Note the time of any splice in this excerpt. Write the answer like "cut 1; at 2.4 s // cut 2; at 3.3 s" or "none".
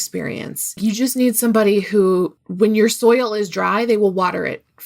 cut 1; at 0.8 s // cut 2; at 2.4 s